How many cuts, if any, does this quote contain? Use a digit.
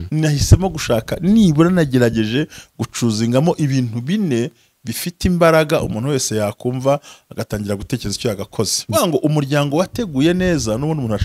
1